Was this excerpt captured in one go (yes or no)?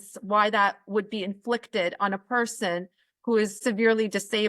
no